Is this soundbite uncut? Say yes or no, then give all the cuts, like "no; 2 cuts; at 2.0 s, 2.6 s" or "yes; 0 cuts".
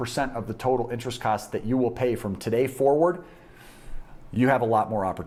yes; 0 cuts